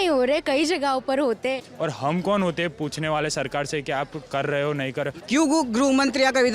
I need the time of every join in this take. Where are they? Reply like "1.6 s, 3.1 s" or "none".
1.7 s, 5.1 s